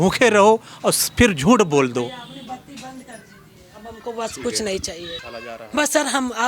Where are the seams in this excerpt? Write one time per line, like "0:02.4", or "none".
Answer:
0:05.1